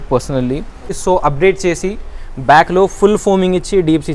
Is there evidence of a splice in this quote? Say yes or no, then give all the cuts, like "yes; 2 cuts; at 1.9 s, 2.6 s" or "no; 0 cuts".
yes; 1 cut; at 1.0 s